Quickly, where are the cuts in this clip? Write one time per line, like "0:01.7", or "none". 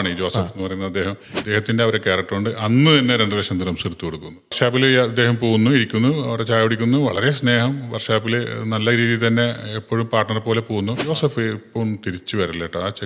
0:01.3
0:04.6
0:11.0